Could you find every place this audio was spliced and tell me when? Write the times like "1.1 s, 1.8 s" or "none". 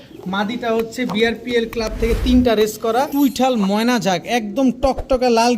3.1 s